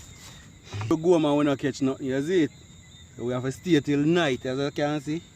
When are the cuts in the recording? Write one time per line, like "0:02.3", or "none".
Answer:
0:00.9